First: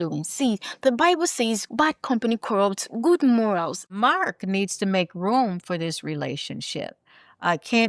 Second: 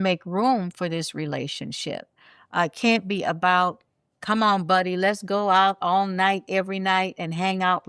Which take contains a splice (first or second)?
first